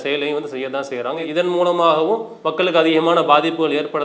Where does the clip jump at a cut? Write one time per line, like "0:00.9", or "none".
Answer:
0:02.4